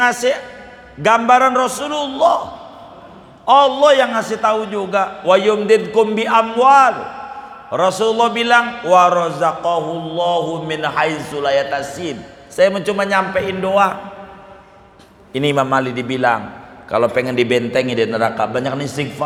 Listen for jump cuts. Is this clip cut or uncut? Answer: uncut